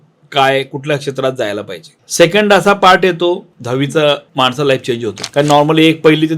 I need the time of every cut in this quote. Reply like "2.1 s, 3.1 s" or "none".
2.0 s, 4.3 s